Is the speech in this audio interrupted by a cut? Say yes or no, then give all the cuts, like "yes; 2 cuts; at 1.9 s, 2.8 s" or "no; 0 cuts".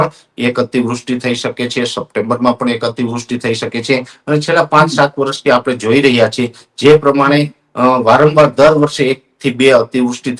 no; 0 cuts